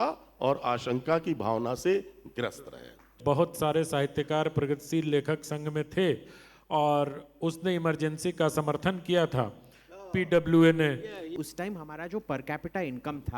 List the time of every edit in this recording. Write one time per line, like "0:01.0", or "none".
0:03.1
0:11.3

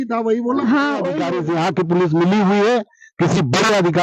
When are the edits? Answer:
0:01.2

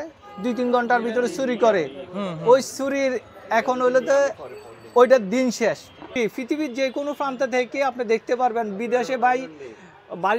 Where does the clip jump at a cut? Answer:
0:06.0

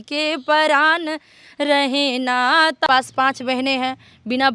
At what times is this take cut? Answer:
0:02.9

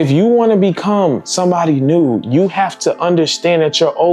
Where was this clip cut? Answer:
none

